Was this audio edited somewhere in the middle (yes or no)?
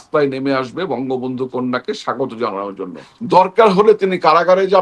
yes